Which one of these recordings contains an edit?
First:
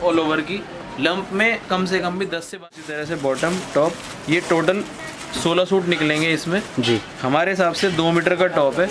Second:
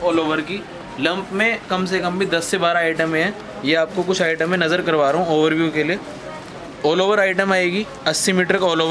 first; 1 cut; at 2.4 s

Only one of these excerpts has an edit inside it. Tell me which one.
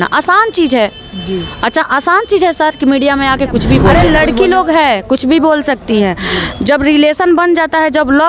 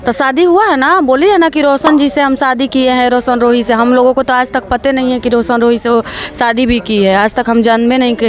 first; 1 cut; at 3.9 s

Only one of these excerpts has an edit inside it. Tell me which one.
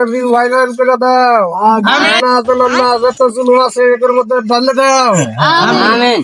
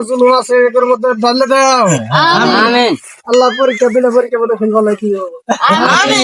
first; 1 cut; at 2.2 s

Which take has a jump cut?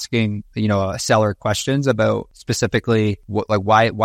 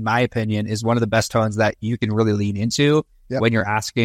first; 2 cuts; at 2.4 s, 3.2 s

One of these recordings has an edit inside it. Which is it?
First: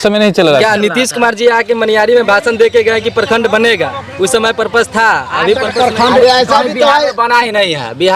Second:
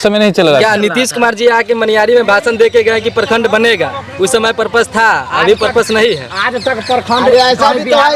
first; 1 cut; at 5.7 s

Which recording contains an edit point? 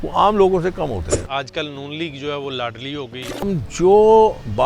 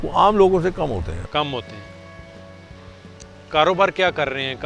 first; 2 cuts; at 1.2 s, 3.5 s

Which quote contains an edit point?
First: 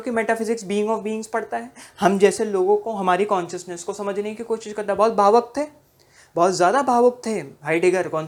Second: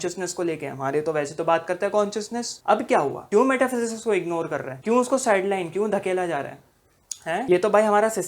second; 3 cuts; at 2.5 s, 3.2 s, 4.7 s

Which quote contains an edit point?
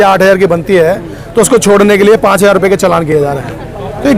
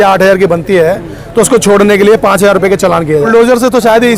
second; 1 cut; at 3.2 s

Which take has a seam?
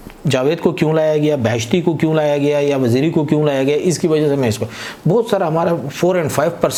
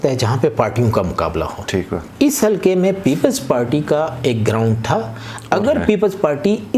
second; 1 cut; at 2.0 s

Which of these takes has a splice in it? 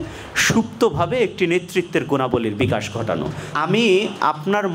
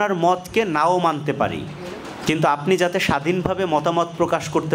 first; 1 cut; at 3.5 s

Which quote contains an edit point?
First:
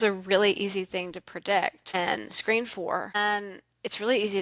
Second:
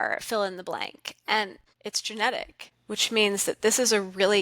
second; 1 cut; at 1.7 s

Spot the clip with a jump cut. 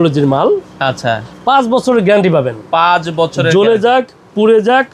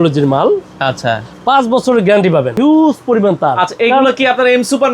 second; 1 cut; at 2.6 s

